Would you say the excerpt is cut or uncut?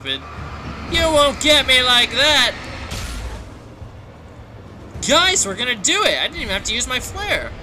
cut